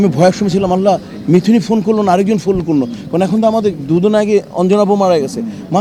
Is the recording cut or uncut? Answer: uncut